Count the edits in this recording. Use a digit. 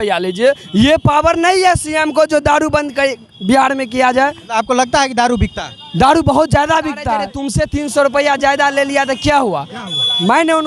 1